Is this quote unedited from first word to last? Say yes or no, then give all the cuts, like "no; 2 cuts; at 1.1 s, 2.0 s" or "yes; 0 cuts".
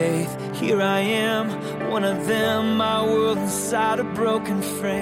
yes; 0 cuts